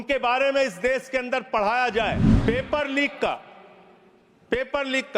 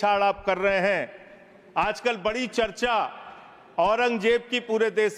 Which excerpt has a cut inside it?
first; 1 cut; at 2.3 s

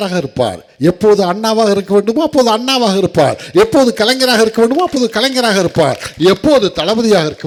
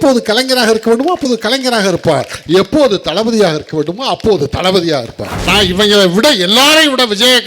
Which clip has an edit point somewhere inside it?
second; 1 cut; at 5.3 s

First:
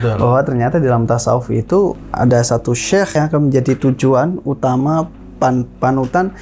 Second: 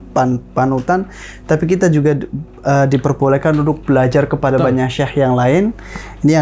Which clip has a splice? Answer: first; 2 cuts; at 2.0 s, 3.1 s

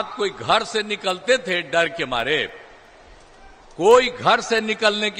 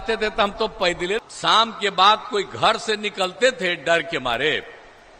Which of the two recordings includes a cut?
second; 1 cut; at 1.2 s

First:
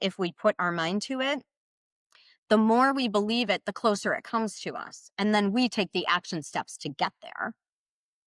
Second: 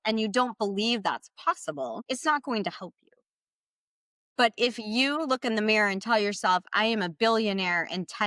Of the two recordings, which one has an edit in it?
second; 1 cut; at 2.0 s

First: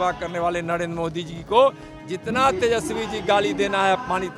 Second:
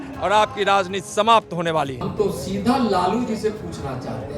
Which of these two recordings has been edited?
second; 1 cut; at 2.0 s

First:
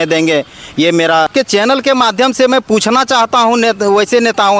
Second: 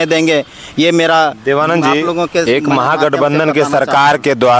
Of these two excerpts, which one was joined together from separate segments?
first; 1 cut; at 1.3 s

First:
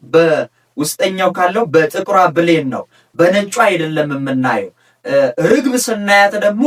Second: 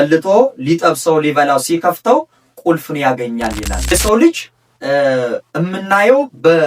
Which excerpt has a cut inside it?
second; 1 cut; at 3.9 s

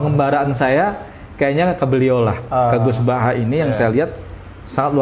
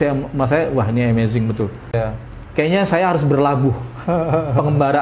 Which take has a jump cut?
second; 1 cut; at 2.0 s

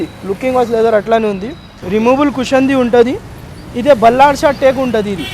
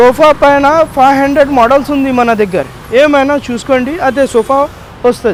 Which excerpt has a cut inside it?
first; 1 cut; at 1.7 s

